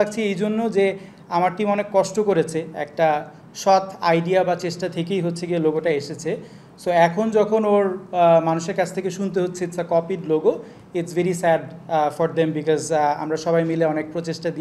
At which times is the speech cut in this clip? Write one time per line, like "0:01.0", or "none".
none